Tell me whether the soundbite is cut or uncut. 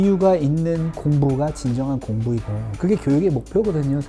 uncut